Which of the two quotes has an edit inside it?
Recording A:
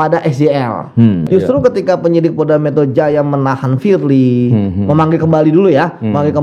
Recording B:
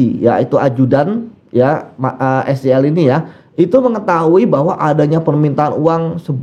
A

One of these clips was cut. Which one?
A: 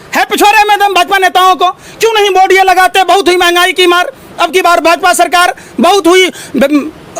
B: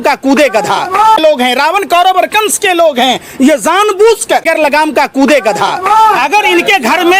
B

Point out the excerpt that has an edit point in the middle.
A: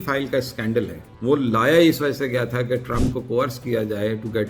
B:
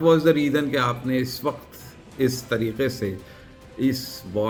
A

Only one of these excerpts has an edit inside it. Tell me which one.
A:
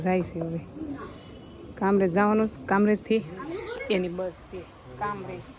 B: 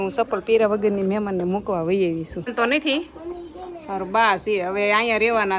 B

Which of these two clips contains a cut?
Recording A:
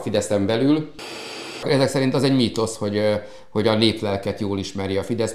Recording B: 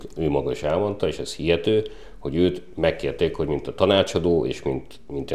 A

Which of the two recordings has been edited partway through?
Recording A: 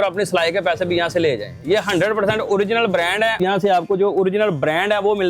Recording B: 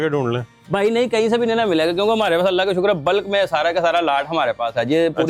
A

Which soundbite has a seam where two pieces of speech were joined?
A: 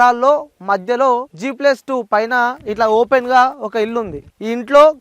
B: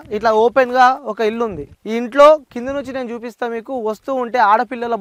A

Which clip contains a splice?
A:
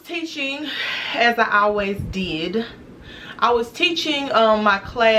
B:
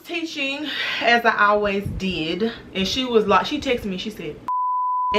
B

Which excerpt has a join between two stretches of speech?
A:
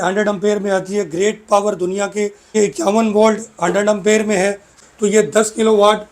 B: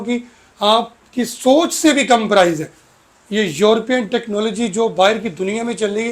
A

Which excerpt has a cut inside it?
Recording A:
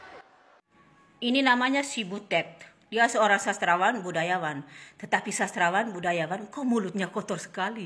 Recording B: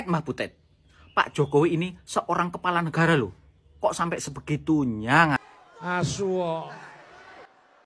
B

